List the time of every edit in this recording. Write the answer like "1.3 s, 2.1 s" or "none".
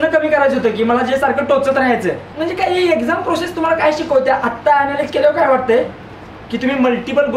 2.3 s

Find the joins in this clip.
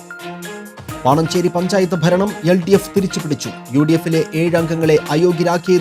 1.0 s

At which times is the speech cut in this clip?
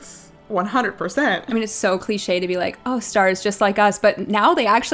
1.4 s

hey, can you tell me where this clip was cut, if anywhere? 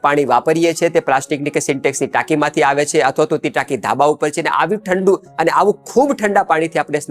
none

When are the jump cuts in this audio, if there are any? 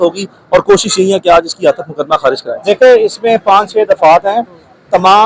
2.5 s

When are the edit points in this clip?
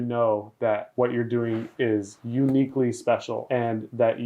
0.9 s, 3.4 s

